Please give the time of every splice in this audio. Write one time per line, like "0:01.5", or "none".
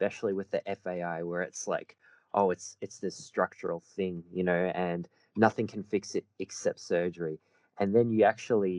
none

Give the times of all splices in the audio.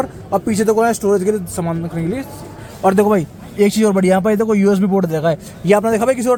none

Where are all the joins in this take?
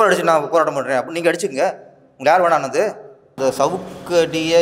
0:03.3

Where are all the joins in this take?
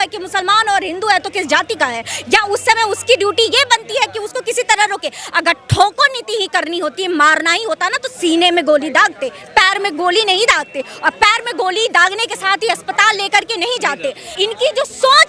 0:14.2

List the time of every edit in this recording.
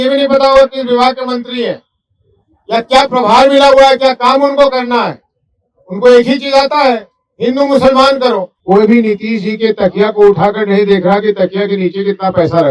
0:08.5

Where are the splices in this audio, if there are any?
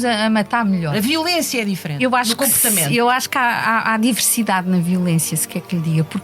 0:00.9
0:02.0

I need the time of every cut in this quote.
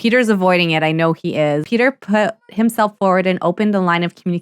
0:01.6

